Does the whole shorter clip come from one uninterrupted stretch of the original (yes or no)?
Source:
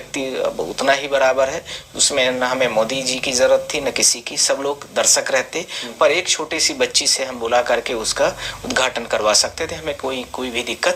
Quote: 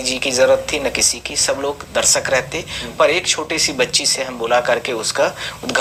yes